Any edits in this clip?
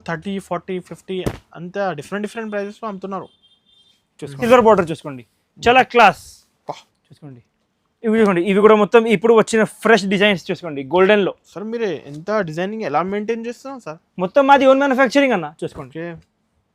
yes; 1 cut; at 4.4 s

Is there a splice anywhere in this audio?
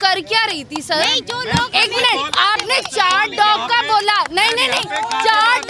no; 0 cuts

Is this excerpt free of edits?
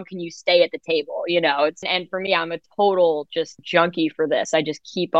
no; 2 cuts; at 1.8 s, 3.6 s

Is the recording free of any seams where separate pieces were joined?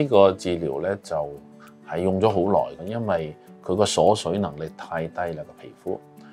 yes; 0 cuts

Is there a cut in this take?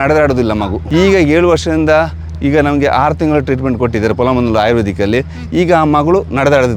no; 0 cuts

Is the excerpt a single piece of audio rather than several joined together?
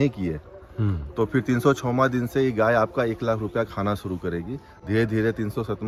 yes; 0 cuts

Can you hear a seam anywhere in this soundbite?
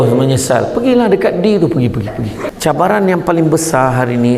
yes; 1 cut; at 2.4 s

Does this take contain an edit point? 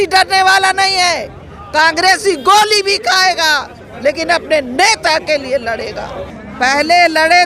yes; 1 cut; at 6.4 s

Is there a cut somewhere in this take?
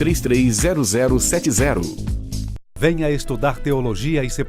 yes; 1 cut; at 2.6 s

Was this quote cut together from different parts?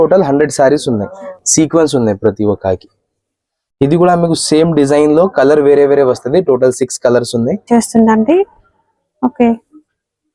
yes; 2 cuts; at 1.3 s, 7.6 s

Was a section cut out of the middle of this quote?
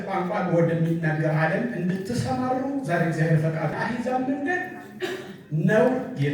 yes; 1 cut; at 3.7 s

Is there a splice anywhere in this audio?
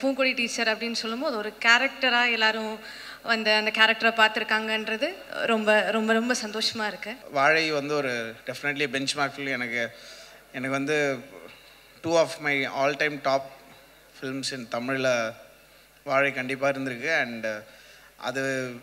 yes; 1 cut; at 7.1 s

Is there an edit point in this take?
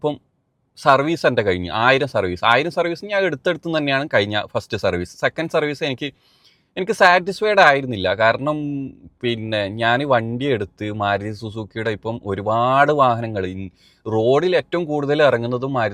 no; 0 cuts

